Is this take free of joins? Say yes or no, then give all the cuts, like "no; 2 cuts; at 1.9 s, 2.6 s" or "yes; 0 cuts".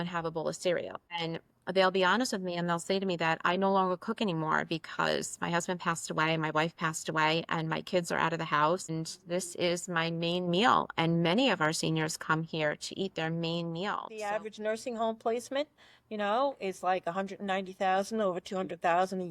no; 1 cut; at 14.2 s